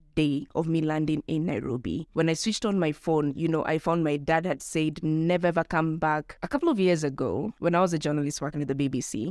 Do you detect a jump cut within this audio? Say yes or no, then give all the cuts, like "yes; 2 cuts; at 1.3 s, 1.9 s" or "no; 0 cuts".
yes; 2 cuts; at 2.1 s, 6.3 s